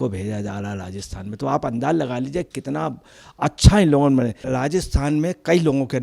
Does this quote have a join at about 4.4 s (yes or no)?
yes